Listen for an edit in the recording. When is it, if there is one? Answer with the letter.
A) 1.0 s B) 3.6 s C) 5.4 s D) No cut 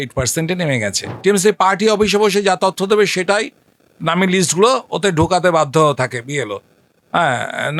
A